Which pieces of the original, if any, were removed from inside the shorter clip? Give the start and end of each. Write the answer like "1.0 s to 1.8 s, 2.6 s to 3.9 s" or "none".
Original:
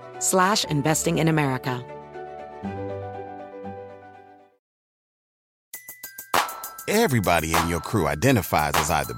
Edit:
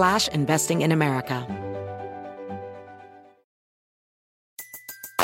1.8 s to 2.6 s